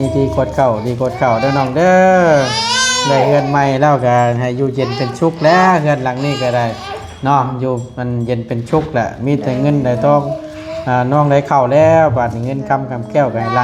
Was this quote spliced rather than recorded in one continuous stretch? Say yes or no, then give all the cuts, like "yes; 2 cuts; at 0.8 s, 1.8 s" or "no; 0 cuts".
no; 0 cuts